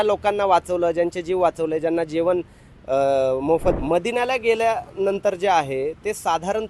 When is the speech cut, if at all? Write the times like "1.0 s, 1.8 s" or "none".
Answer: 3.8 s

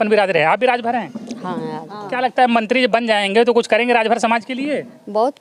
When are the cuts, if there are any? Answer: none

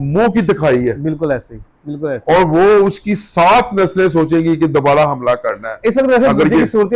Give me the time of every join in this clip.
none

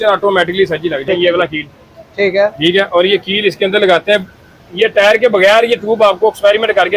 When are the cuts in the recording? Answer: 1.1 s

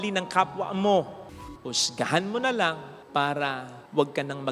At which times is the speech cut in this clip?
1.4 s

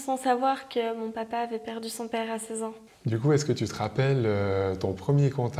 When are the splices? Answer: 2.9 s

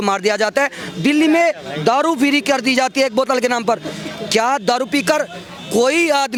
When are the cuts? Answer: none

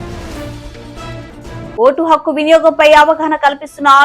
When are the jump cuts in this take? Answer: 1.7 s

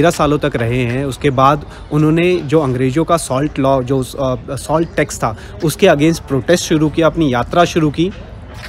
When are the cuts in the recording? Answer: none

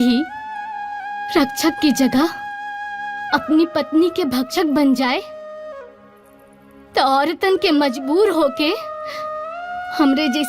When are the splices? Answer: none

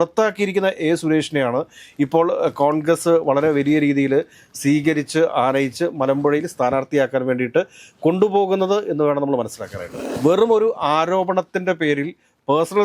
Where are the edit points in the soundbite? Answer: 10.0 s

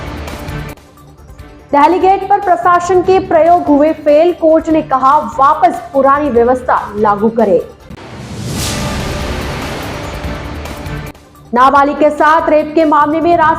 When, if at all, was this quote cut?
0.9 s

